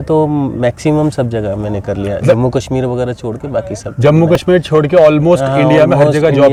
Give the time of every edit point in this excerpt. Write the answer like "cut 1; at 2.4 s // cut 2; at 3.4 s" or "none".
none

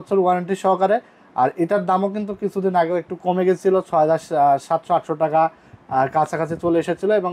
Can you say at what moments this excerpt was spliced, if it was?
none

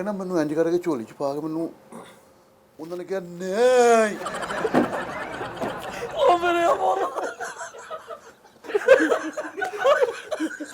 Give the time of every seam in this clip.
cut 1; at 4.4 s // cut 2; at 8.6 s

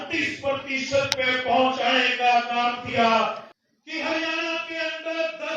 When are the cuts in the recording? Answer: cut 1; at 3.5 s

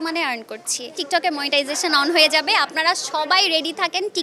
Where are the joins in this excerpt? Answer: cut 1; at 1.0 s

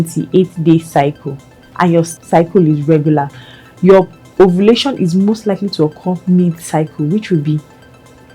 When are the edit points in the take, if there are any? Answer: cut 1; at 2.2 s

